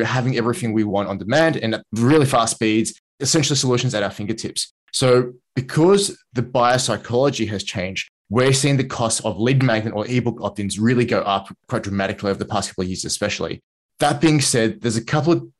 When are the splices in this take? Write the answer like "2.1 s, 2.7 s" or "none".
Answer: 1.8 s, 3.2 s